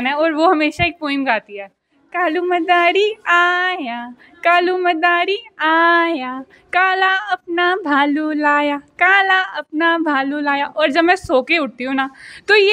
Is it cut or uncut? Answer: uncut